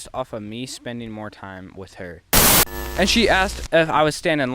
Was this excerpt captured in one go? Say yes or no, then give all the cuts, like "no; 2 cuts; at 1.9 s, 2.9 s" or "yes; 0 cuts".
no; 1 cut; at 2.4 s